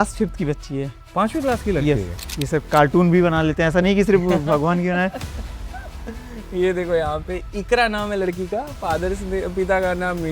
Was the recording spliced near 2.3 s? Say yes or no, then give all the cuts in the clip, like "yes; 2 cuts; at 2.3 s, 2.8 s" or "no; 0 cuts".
yes; 1 cut; at 2.3 s